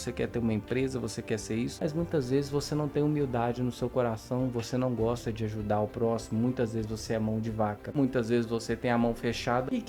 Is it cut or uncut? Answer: cut